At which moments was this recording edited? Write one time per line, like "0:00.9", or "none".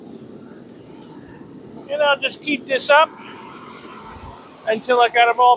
0:01.6